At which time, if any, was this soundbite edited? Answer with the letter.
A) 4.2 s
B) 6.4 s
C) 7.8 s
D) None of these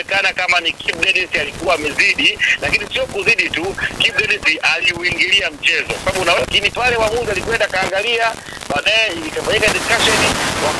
B